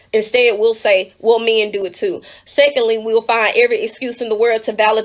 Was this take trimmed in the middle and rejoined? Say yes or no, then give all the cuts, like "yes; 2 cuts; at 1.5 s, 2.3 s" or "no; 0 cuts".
yes; 1 cut; at 1.8 s